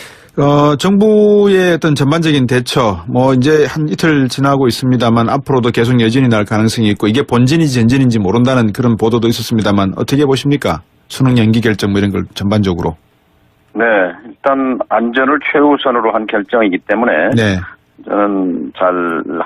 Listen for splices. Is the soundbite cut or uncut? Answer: cut